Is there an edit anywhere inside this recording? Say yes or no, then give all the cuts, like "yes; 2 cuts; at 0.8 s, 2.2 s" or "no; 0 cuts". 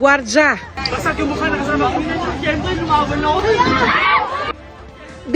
yes; 1 cut; at 3.8 s